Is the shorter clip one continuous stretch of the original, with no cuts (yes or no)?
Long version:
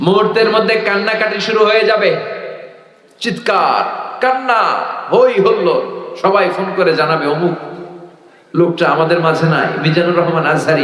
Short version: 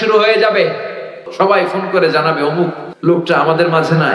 no